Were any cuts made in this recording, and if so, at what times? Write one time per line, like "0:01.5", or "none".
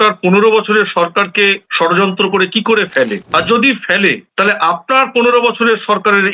none